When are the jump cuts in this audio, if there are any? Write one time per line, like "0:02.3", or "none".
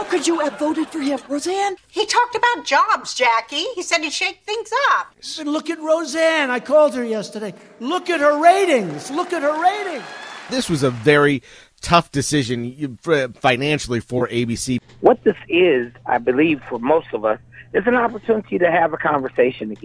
0:01.8
0:05.2
0:10.5
0:14.8